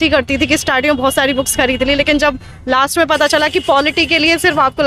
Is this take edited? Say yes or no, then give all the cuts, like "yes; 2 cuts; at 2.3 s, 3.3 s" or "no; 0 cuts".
no; 0 cuts